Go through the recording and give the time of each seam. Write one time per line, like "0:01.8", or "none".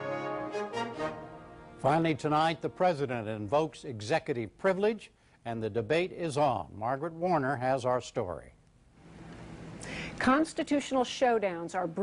none